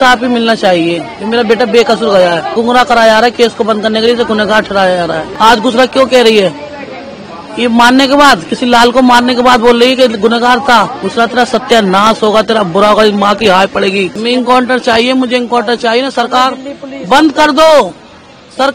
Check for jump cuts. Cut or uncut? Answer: cut